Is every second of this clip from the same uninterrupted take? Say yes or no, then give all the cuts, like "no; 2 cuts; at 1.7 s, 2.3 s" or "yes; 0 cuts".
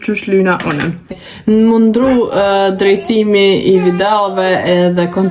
no; 1 cut; at 1.1 s